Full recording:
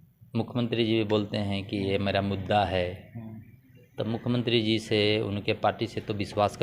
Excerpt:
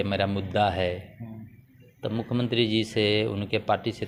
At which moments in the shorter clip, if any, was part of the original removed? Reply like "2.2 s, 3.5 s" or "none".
none